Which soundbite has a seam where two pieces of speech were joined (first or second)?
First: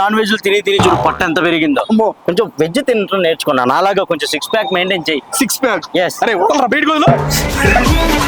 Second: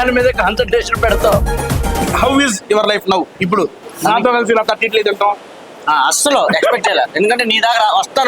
second